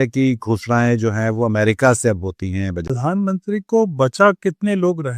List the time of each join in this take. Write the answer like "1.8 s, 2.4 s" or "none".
2.9 s